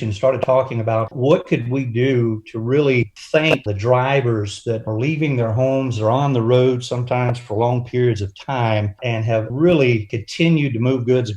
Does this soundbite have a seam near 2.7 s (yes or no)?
no